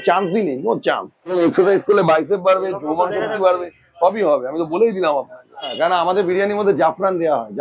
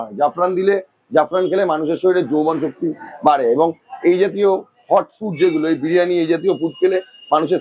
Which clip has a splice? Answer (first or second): first